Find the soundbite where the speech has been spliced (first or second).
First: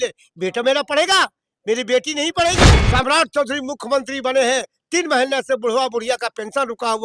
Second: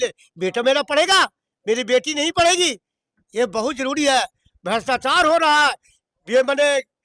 first